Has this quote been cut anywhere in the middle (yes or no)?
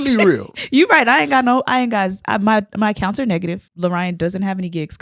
yes